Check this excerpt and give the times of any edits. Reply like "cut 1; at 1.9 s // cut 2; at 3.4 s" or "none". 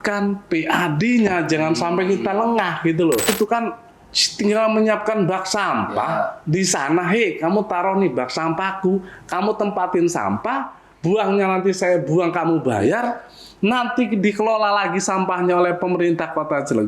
cut 1; at 3.3 s